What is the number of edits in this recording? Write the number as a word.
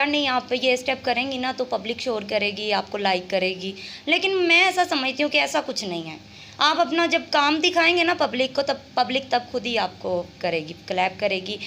zero